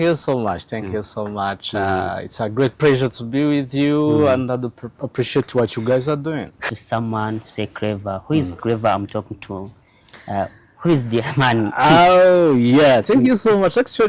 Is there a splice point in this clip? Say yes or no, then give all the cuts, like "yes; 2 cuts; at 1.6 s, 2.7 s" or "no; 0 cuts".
yes; 1 cut; at 6.7 s